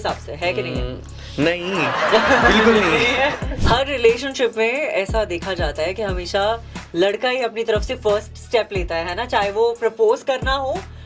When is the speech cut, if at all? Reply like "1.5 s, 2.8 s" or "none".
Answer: 3.5 s

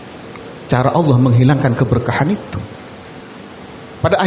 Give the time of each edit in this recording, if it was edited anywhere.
3.2 s

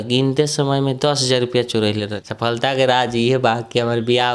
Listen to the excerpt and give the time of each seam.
2.1 s

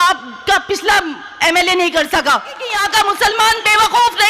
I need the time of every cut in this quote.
2.7 s

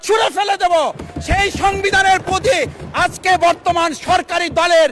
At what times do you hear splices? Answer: none

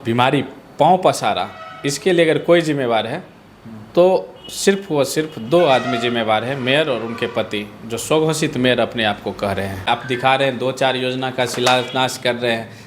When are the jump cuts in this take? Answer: 9.9 s

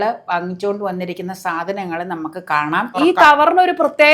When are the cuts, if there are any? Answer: 2.9 s

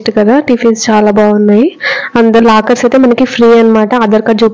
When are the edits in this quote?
2.4 s

